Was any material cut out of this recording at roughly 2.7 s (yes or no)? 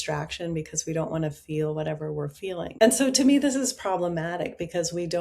yes